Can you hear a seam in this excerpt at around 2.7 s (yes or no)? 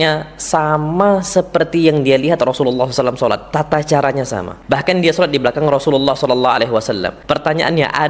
no